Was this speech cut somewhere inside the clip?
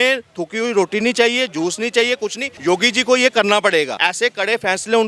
yes; 2 cuts; at 2.5 s, 4.0 s

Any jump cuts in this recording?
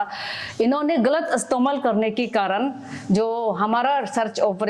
no; 0 cuts

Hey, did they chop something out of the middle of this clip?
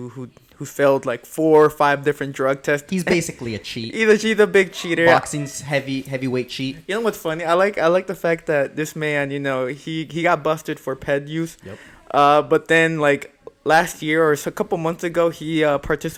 no; 0 cuts

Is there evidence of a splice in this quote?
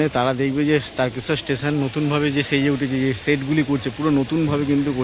no; 0 cuts

